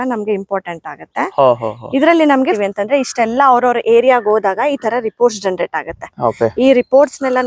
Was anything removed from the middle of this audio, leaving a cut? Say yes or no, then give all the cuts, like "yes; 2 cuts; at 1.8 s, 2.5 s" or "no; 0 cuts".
yes; 1 cut; at 2.4 s